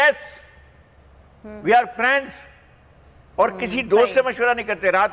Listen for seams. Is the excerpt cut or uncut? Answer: uncut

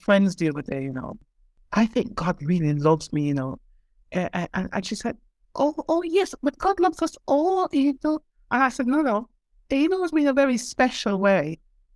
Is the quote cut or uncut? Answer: cut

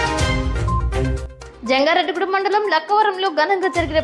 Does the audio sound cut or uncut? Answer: cut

